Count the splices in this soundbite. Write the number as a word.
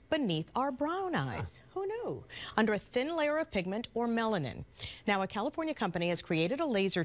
one